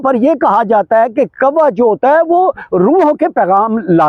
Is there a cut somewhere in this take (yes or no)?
no